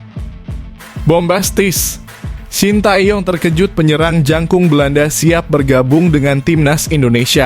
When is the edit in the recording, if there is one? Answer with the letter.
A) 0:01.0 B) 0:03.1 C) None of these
A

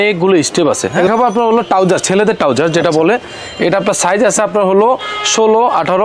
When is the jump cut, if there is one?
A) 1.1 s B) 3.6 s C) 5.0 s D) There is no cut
A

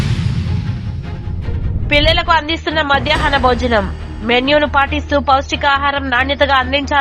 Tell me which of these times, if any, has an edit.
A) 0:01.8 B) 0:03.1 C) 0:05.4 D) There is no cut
A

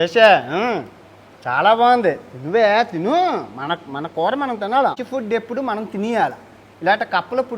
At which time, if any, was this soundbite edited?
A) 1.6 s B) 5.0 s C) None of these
B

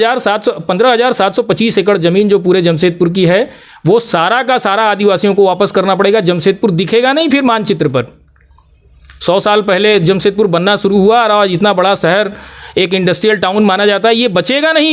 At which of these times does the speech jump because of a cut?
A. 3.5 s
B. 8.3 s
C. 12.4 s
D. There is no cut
D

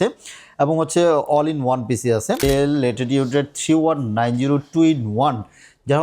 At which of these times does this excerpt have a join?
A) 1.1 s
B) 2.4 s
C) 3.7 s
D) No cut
B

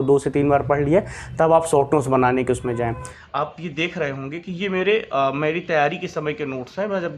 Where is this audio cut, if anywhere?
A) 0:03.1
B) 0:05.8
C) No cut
A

